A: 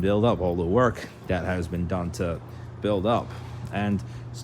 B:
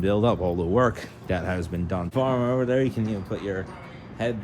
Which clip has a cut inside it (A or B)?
B